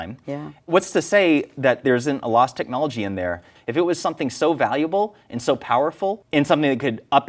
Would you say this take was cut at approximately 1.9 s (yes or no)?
no